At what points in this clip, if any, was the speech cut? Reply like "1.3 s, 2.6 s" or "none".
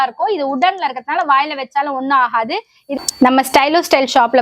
2.8 s